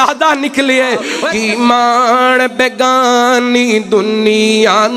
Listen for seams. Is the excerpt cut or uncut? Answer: cut